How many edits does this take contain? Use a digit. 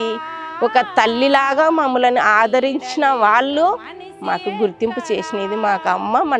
0